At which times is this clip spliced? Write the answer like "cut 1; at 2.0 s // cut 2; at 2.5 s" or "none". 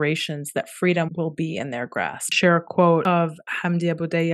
cut 1; at 1.1 s // cut 2; at 2.3 s // cut 3; at 3.0 s